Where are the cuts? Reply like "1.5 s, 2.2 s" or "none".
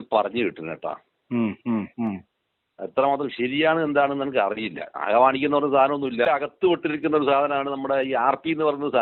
6.2 s